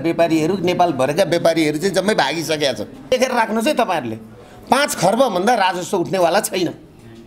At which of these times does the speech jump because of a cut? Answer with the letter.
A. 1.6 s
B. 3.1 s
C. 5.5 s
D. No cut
B